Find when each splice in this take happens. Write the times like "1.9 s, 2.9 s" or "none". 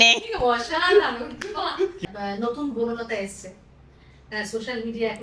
2.0 s